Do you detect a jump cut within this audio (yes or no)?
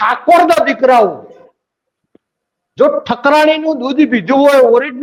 no